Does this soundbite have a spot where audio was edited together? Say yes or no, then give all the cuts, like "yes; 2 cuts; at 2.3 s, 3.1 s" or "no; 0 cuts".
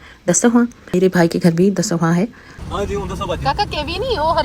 yes; 2 cuts; at 0.9 s, 2.5 s